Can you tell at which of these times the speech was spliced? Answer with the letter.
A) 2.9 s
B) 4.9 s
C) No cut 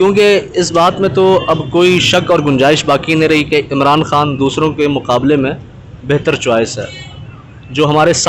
C